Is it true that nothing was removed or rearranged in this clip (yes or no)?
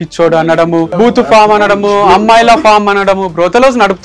no